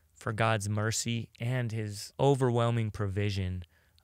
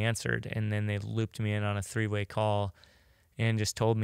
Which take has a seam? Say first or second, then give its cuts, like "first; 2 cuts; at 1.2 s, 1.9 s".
first; 1 cut; at 2.0 s